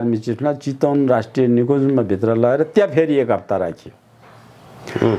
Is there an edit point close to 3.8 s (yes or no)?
no